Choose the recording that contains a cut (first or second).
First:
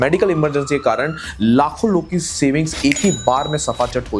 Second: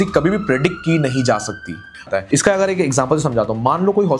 second